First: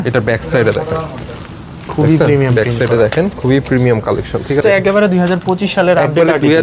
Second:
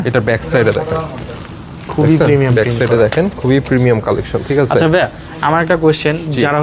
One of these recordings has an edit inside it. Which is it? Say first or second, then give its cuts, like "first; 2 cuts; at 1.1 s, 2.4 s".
first; 1 cut; at 4.6 s